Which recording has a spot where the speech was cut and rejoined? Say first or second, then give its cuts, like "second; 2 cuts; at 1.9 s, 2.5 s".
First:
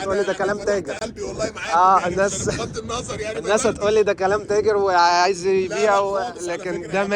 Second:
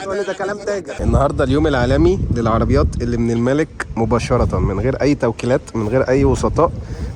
second; 1 cut; at 1.0 s